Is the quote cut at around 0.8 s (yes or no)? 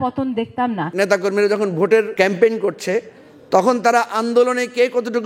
yes